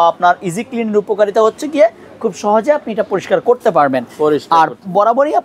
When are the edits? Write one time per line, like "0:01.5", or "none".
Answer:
none